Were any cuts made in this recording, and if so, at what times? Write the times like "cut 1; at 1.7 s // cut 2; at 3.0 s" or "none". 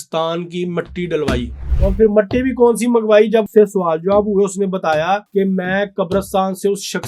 cut 1; at 1.6 s // cut 2; at 3.5 s // cut 3; at 5.3 s